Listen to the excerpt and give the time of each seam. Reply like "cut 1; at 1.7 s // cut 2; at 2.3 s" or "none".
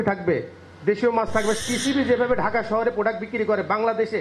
cut 1; at 1.6 s